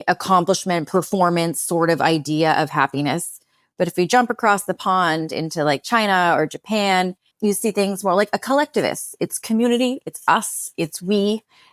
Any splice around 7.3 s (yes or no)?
yes